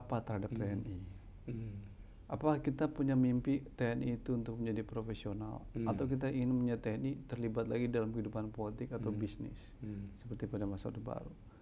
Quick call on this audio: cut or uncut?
uncut